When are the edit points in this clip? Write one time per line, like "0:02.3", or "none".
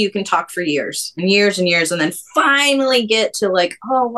none